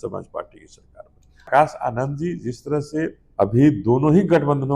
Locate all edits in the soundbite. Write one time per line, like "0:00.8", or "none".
0:01.5
0:03.2